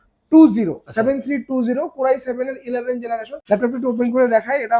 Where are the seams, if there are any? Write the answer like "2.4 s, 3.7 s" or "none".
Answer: 3.3 s